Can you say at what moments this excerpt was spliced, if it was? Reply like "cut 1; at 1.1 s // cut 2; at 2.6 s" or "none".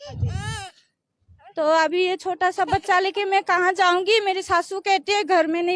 none